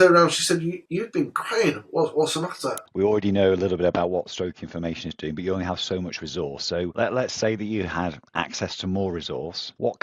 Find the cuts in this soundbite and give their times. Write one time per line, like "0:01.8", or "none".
0:02.8

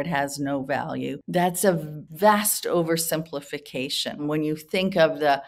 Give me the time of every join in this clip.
0:01.2
0:02.0
0:04.2

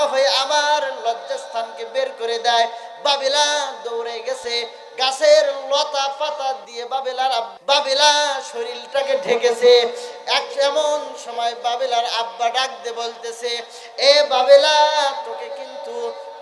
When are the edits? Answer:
0:07.5

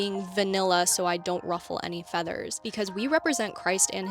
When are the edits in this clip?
0:02.6

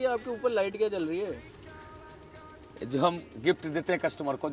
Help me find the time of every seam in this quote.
none

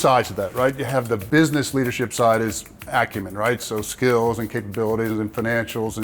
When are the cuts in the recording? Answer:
0:01.2

